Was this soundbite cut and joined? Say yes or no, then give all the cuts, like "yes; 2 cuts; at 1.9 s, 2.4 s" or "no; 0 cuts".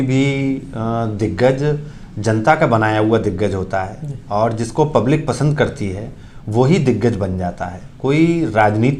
no; 0 cuts